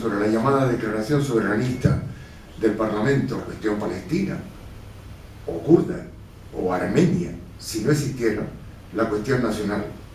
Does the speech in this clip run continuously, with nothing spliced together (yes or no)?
yes